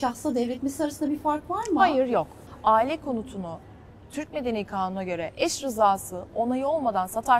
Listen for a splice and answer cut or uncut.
cut